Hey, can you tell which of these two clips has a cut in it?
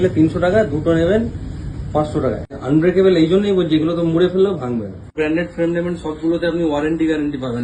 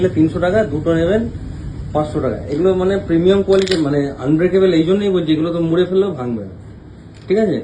first; 2 cuts; at 2.5 s, 5.1 s

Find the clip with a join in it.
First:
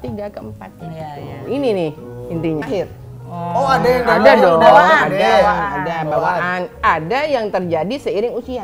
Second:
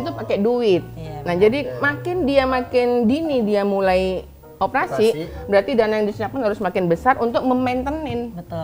first; 1 cut; at 2.6 s

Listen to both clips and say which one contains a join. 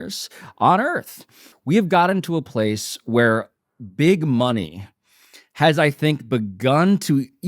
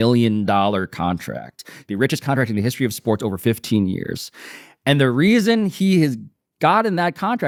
first; 1 cut; at 1.5 s

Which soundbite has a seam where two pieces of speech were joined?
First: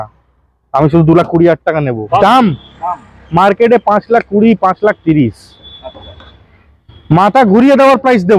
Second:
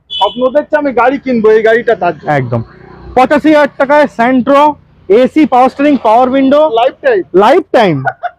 first; 1 cut; at 2.2 s

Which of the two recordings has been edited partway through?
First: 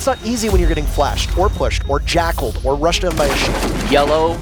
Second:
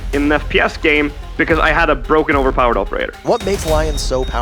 second; 2 cuts; at 1.2 s, 3.1 s

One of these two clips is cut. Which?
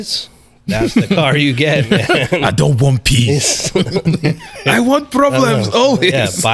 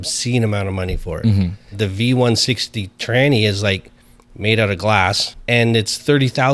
second; 2 cuts; at 1.7 s, 5.3 s

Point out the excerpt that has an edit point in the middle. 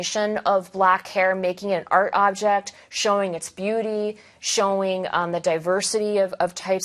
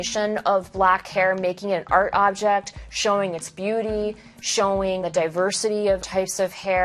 second; 2 cuts; at 5.0 s, 6.0 s

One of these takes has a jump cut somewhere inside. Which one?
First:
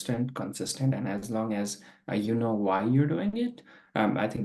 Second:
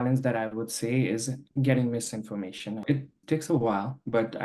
second; 1 cut; at 2.8 s

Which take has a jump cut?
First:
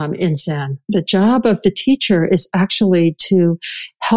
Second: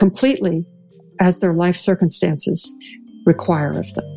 second; 1 cut; at 2.7 s

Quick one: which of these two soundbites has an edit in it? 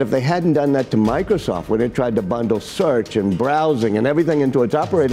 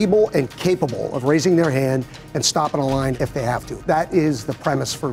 second; 1 cut; at 3.7 s

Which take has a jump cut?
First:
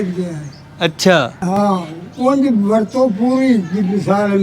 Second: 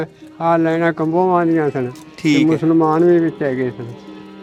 first; 1 cut; at 1.4 s

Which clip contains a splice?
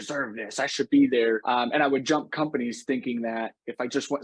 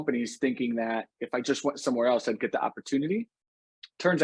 first; 1 cut; at 1.4 s

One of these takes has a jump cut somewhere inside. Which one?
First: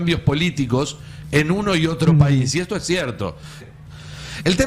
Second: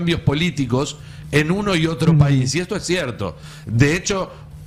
first; 1 cut; at 3.7 s

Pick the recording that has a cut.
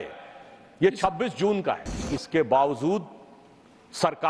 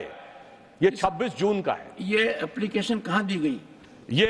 first; 1 cut; at 2.0 s

